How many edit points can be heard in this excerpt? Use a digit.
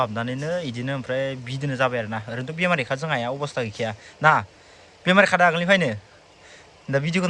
0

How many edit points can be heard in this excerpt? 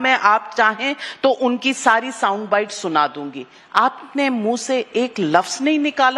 0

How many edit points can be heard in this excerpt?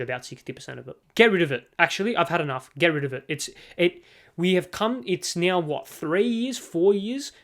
1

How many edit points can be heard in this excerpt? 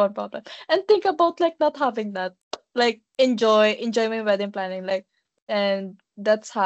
1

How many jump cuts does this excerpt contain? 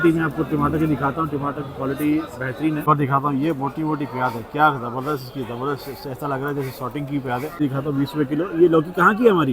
2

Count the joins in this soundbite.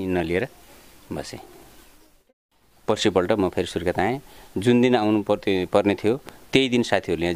1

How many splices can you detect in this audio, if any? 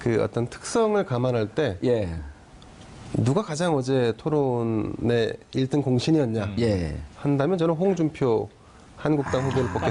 0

